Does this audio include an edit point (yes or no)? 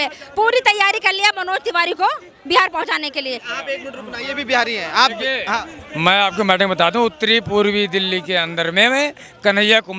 no